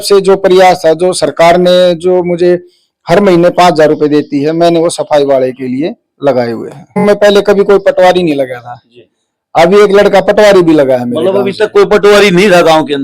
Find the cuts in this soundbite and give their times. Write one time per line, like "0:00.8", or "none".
0:07.0